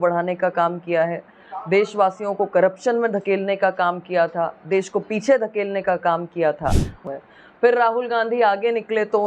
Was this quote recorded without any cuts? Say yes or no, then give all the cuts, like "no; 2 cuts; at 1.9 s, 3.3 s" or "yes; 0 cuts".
no; 1 cut; at 6.9 s